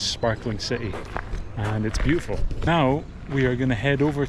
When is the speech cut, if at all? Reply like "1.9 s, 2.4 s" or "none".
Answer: 2.7 s